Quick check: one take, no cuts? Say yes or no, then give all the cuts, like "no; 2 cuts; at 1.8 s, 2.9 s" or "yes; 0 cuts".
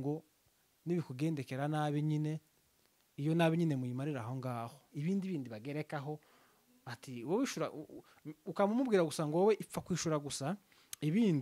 no; 1 cut; at 4.8 s